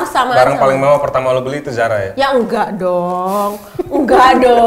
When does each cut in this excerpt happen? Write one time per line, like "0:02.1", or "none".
none